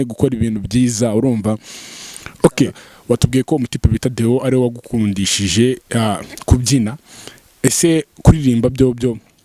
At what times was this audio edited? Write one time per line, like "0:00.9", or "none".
0:02.9